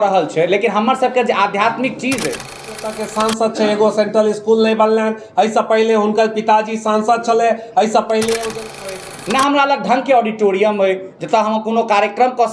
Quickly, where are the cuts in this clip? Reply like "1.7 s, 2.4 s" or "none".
2.7 s, 8.8 s